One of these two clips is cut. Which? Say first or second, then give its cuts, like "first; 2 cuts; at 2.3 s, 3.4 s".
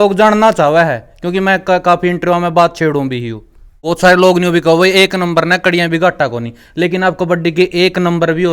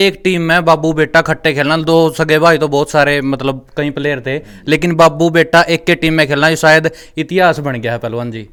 first; 1 cut; at 3.7 s